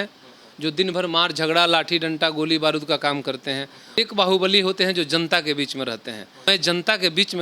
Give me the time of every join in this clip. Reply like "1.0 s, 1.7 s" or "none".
4.0 s, 6.5 s